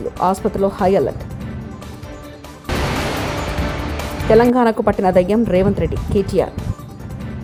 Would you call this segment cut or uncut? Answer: uncut